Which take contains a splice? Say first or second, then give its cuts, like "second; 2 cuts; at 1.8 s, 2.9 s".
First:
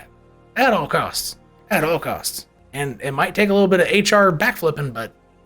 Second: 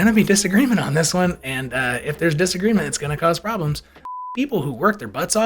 second; 1 cut; at 4.3 s